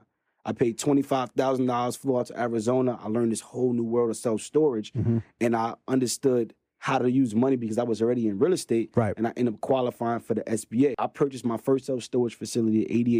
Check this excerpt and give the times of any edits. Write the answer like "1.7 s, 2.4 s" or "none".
11.0 s